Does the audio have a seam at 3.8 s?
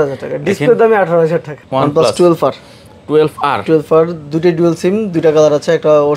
no; 1 cut; at 1.6 s

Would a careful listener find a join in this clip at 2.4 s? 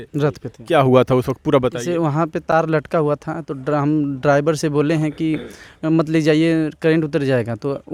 no; 0 cuts

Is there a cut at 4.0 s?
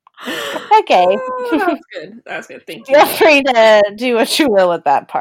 no; 0 cuts

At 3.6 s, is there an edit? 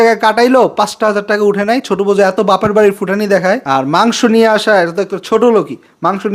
yes; 1 cut; at 3.6 s

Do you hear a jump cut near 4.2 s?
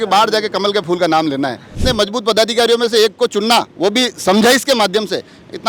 no; 1 cut; at 1.8 s

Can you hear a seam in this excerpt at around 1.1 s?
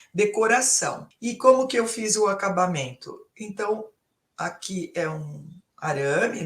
yes; 1 cut; at 1.1 s

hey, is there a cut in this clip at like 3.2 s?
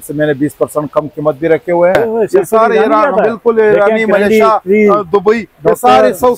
no; 1 cut; at 1.9 s

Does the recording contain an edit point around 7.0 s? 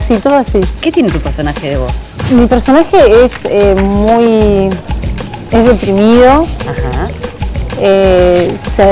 yes; 1 cut; at 7.0 s

